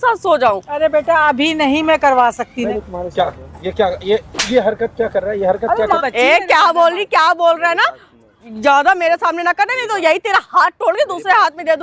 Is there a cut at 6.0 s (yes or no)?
yes